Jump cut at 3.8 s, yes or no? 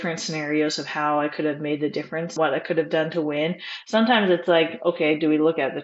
no